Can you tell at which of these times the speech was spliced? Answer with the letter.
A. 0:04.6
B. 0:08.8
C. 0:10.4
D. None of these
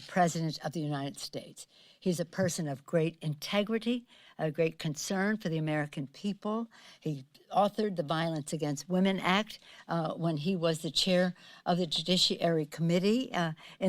C